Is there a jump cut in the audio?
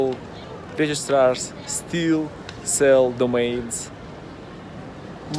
no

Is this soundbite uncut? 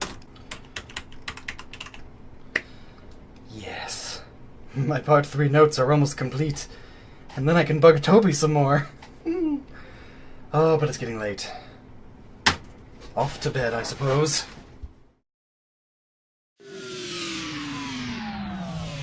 yes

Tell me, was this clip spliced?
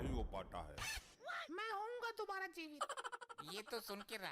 no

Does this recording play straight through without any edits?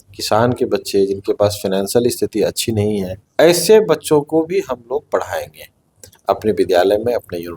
no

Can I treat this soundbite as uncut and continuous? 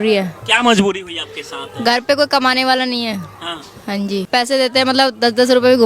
no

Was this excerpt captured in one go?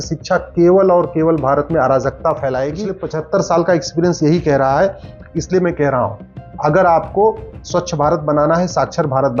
no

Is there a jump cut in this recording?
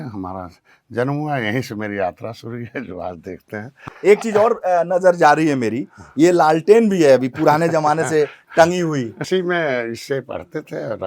yes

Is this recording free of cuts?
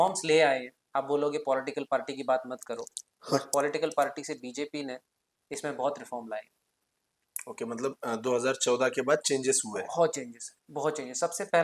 yes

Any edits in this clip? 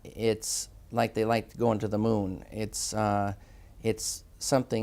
no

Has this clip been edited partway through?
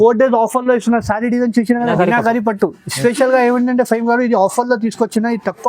yes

